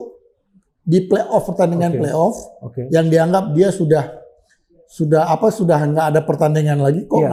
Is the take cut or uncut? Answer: uncut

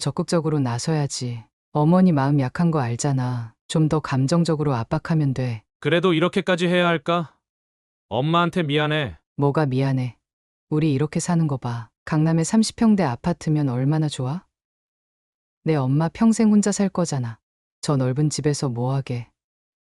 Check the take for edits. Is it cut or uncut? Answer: uncut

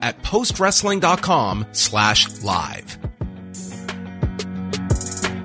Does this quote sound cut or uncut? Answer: uncut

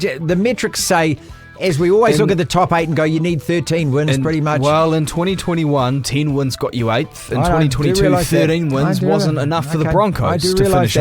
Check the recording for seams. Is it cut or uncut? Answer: uncut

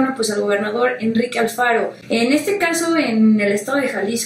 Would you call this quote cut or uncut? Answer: cut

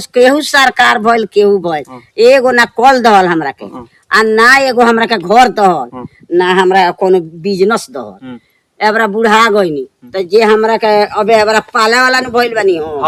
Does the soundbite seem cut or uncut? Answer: uncut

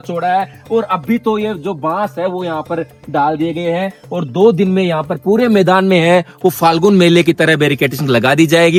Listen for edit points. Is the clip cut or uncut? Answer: uncut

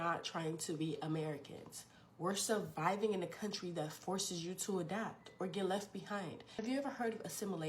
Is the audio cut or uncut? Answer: cut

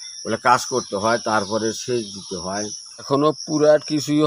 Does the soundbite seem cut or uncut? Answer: cut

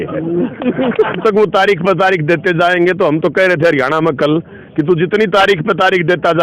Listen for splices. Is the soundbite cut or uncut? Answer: cut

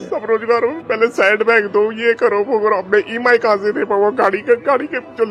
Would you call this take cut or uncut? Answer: uncut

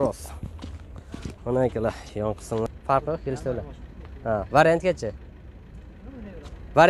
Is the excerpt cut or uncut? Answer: cut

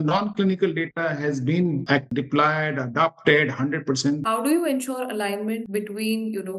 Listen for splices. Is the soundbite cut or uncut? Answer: cut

